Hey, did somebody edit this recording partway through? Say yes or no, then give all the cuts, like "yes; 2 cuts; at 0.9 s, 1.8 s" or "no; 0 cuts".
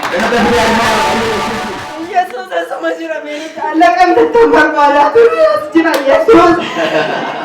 yes; 1 cut; at 1.7 s